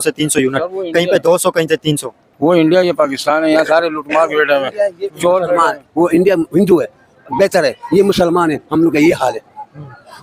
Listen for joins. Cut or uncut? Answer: uncut